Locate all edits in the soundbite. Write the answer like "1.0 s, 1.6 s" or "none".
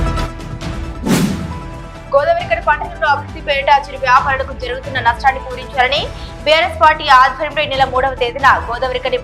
1.3 s